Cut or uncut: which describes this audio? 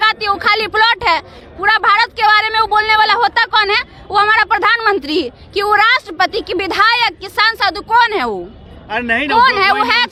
uncut